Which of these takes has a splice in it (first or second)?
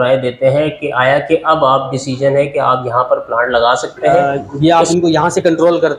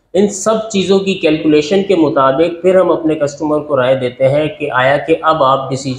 first